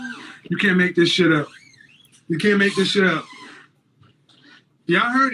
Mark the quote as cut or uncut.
uncut